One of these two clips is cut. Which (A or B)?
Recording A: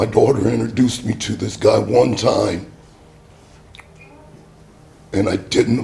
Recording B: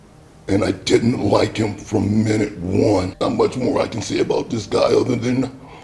B